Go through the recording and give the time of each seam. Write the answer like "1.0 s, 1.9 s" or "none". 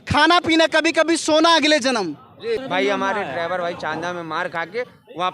2.6 s